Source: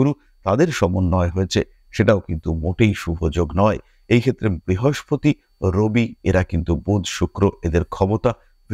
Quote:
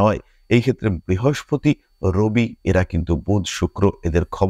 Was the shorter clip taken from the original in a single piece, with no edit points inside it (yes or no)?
yes